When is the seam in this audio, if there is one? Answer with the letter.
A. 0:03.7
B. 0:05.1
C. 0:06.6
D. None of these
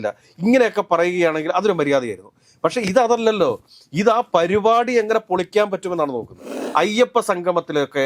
C